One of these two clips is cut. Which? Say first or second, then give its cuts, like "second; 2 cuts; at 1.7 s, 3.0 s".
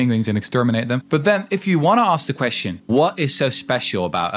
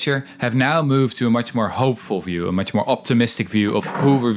first; 2 cuts; at 1.0 s, 2.9 s